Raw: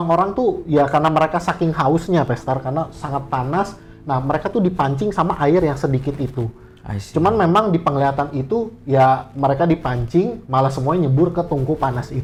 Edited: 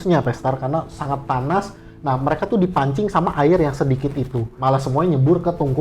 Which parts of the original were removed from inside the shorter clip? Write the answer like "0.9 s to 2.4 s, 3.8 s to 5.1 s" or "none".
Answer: 6.5 s to 10.4 s